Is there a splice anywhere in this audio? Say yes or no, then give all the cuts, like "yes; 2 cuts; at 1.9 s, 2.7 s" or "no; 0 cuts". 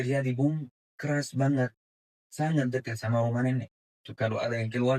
yes; 1 cut; at 4.0 s